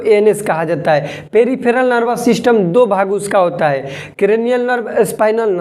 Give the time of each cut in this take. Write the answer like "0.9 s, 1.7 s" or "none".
none